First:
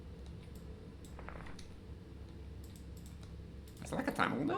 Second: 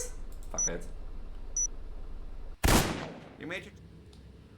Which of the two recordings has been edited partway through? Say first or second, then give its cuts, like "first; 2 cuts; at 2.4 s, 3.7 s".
second; 1 cut; at 3.3 s